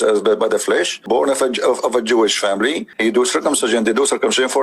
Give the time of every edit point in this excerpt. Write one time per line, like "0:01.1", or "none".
0:01.0
0:02.9